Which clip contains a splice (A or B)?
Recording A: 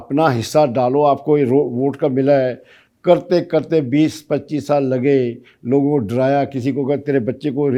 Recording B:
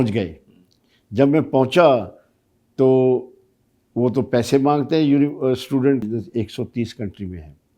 B